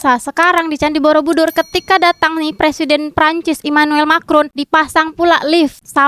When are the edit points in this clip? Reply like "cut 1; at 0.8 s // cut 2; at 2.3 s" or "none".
none